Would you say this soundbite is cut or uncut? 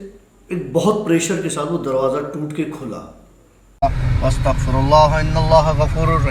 cut